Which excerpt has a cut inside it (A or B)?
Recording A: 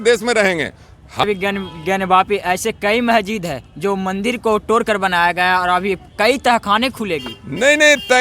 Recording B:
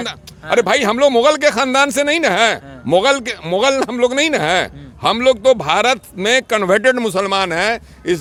A